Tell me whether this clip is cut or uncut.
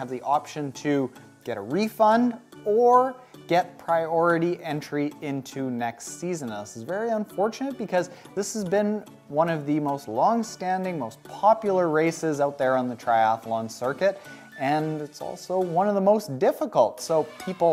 uncut